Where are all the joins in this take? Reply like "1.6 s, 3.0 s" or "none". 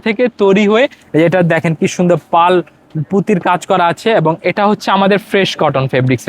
1.0 s